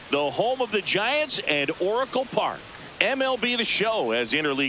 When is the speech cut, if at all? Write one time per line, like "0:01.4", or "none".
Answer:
0:02.9